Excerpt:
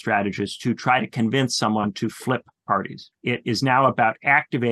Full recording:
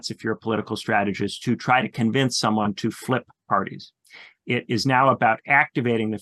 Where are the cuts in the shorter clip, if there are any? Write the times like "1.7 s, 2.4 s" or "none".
3.0 s